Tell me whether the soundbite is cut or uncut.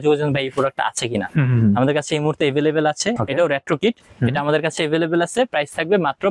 cut